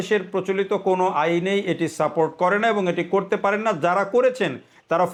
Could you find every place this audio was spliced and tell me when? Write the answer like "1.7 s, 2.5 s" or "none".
none